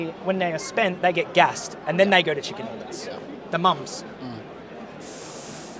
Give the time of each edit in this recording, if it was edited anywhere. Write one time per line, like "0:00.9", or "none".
none